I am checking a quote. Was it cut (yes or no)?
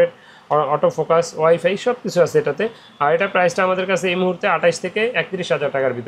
no